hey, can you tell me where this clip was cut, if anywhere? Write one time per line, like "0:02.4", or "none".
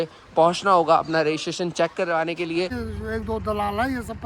0:02.7